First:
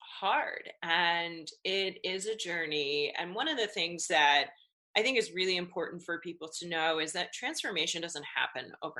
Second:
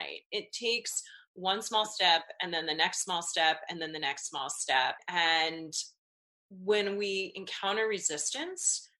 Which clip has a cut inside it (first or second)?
second